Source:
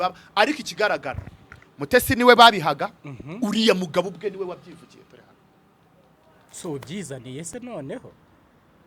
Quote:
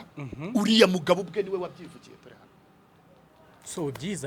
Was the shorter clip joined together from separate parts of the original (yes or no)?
no